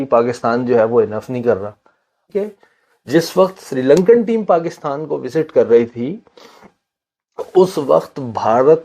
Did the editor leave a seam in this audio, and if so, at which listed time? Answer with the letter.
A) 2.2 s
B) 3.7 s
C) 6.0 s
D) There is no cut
A